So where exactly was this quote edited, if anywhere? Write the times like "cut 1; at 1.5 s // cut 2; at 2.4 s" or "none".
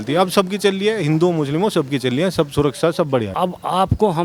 cut 1; at 3.3 s